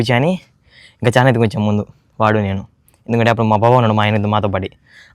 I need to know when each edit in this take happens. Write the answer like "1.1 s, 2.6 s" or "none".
none